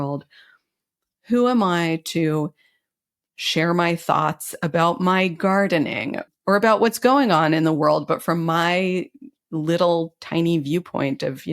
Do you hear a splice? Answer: yes; 1 cut; at 6.3 s

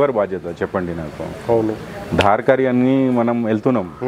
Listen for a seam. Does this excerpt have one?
no; 0 cuts

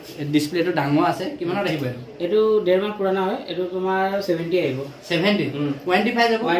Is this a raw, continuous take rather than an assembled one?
yes; 0 cuts

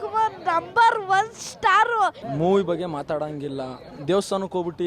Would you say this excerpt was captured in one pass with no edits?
no; 1 cut; at 2.2 s

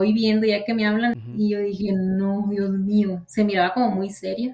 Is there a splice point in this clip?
yes; 1 cut; at 1.1 s

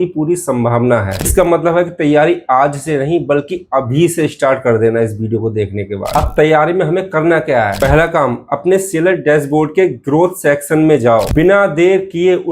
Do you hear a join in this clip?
yes; 2 cuts; at 1.1 s, 11.3 s

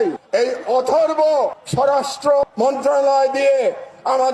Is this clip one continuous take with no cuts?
no; 2 cuts; at 1.6 s, 2.5 s

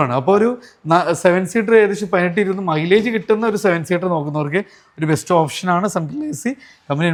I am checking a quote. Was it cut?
no; 0 cuts

